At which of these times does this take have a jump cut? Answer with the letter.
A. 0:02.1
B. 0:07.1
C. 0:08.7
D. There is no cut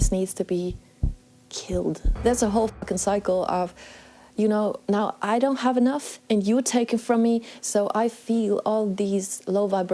A